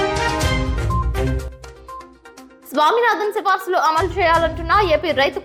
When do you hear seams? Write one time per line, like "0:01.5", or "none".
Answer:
none